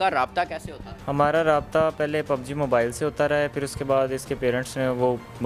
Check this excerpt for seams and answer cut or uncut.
uncut